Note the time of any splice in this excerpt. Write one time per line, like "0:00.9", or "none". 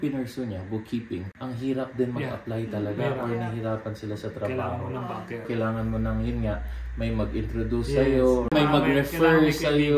0:01.3
0:05.5
0:08.5